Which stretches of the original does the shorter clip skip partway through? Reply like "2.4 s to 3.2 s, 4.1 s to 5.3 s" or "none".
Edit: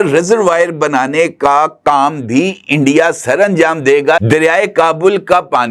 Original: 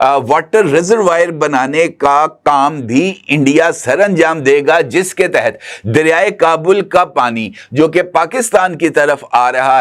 4.8 s to 5.8 s